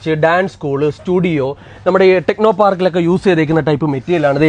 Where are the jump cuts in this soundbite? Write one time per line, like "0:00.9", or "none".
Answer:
none